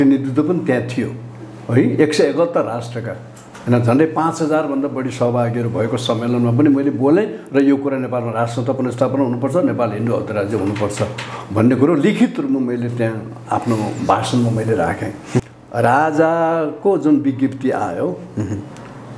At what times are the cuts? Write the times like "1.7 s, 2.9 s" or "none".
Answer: 15.4 s